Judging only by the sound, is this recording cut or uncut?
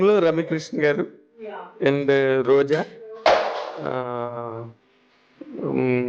uncut